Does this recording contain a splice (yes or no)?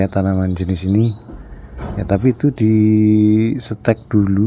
no